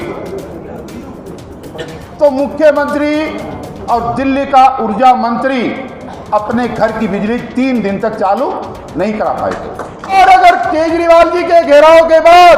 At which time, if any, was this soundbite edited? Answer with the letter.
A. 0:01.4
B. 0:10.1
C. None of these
B